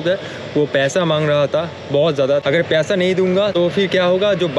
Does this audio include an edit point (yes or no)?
yes